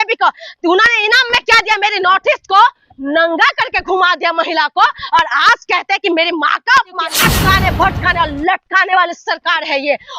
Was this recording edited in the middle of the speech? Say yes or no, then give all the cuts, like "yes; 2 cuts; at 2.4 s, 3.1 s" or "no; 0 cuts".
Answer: yes; 1 cut; at 7.1 s